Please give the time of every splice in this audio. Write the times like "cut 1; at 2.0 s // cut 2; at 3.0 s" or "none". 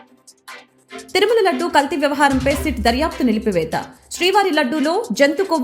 cut 1; at 1.1 s